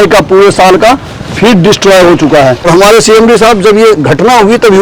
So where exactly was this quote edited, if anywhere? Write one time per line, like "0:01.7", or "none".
0:02.7